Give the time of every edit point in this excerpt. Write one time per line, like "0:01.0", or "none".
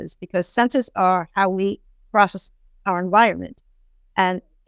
none